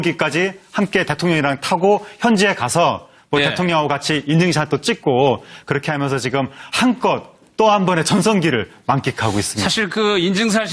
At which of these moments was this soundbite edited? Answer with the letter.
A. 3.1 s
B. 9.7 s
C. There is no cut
A